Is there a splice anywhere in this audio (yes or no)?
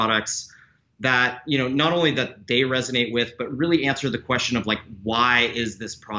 no